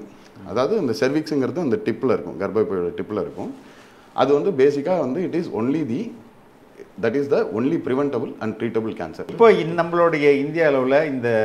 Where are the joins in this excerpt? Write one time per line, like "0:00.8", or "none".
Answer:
0:09.3